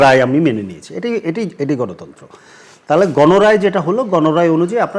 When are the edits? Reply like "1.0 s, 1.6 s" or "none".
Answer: none